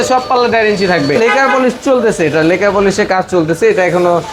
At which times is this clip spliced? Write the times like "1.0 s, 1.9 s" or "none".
1.2 s